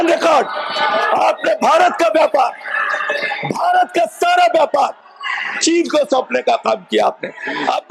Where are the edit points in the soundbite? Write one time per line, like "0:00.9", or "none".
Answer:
none